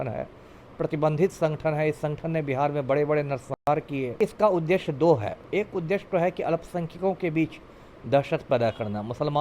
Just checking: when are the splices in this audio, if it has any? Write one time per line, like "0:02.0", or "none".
0:04.1
0:05.4